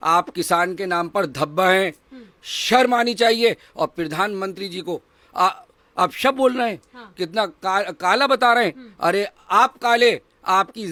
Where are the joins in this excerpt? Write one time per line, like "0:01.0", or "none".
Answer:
none